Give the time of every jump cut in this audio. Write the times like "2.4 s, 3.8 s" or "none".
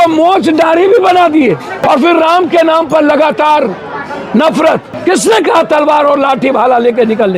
1.8 s, 4.9 s